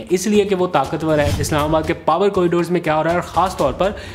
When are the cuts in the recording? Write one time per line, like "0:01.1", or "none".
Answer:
0:01.3